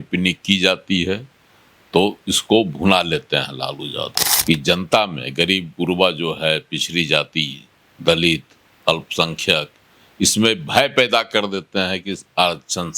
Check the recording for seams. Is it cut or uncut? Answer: cut